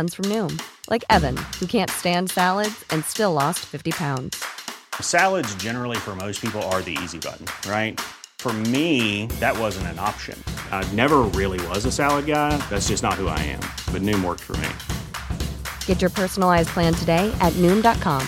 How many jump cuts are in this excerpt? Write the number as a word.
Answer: zero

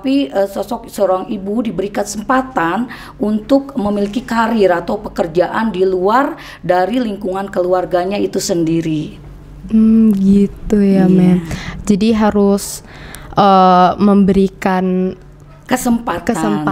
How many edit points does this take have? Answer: zero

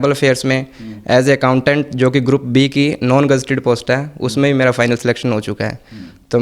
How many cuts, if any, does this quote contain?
zero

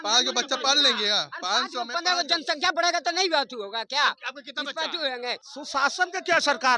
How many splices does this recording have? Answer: one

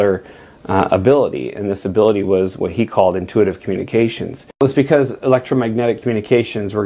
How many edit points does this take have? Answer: one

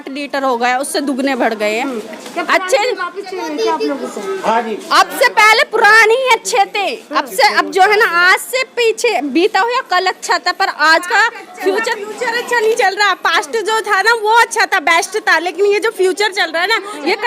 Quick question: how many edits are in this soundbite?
one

